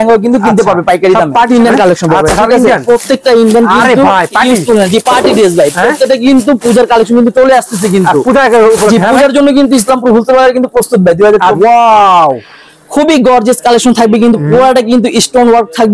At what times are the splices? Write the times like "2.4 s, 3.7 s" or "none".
1.5 s, 11.6 s